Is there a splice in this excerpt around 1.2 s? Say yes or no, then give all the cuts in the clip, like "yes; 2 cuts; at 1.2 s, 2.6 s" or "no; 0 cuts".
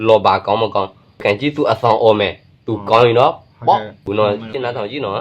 yes; 2 cuts; at 1.2 s, 4.1 s